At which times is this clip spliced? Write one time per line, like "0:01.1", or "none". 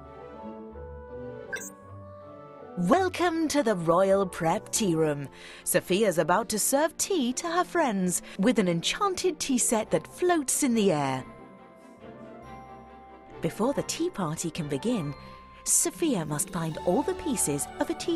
0:02.9